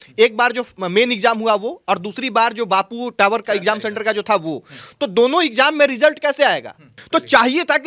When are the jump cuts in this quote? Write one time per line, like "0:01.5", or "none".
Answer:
0:06.9